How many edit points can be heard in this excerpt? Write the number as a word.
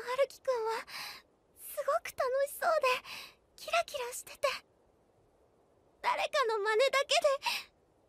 one